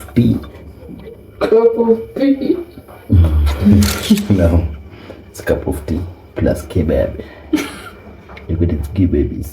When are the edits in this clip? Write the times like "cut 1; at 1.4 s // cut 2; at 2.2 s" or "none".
cut 1; at 3.5 s